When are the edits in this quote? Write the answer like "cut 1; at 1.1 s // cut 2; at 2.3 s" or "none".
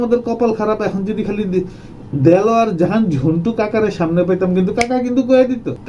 none